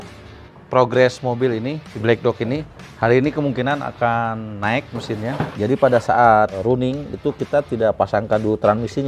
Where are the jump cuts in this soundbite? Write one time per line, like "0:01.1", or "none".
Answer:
0:01.9
0:05.5
0:06.6